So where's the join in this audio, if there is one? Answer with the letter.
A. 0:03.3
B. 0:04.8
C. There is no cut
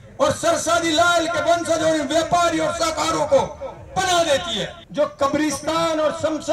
B